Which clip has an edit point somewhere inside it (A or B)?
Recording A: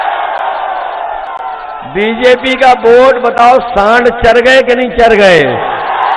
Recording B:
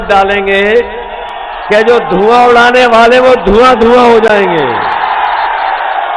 A